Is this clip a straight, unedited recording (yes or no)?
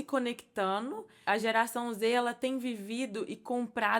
no